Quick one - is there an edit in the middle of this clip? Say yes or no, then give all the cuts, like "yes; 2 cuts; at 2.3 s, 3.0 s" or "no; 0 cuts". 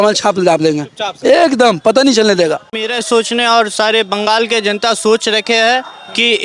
yes; 1 cut; at 2.9 s